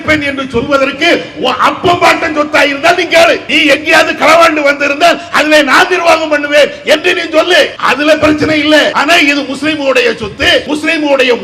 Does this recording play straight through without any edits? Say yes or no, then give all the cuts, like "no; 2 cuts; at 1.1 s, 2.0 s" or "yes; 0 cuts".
no; 4 cuts; at 3.4 s, 7.8 s, 9.0 s, 10.7 s